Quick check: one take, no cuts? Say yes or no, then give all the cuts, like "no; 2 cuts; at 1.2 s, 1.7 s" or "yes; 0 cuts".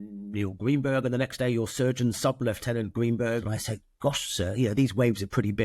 no; 1 cut; at 3.5 s